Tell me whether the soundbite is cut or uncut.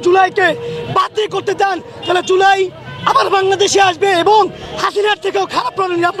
uncut